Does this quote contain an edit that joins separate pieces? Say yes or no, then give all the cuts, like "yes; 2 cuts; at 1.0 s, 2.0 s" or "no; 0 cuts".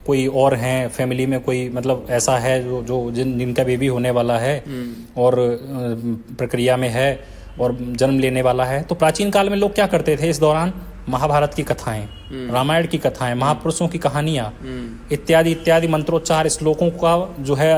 no; 0 cuts